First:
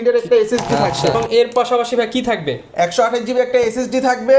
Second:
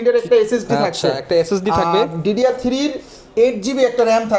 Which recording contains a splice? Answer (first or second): first